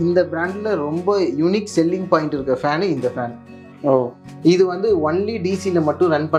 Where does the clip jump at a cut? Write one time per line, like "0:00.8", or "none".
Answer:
none